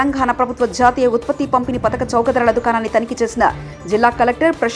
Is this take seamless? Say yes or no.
yes